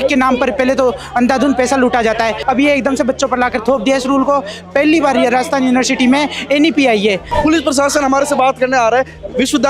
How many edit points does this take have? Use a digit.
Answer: 2